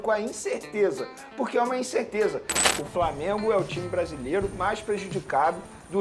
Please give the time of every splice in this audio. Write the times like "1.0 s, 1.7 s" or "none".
2.7 s

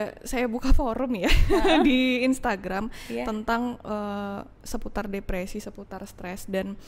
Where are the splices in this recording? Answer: none

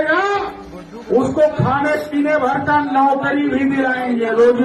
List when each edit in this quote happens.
none

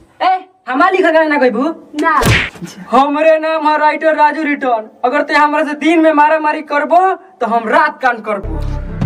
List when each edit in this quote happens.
none

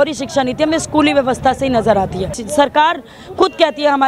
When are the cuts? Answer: 2.4 s

